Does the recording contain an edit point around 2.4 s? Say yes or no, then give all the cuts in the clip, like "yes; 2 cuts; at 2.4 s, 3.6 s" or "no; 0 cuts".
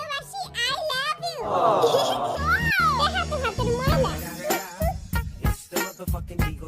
yes; 1 cut; at 2.4 s